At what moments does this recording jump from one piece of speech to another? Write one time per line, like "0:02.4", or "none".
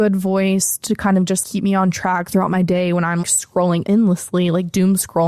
0:01.4
0:03.6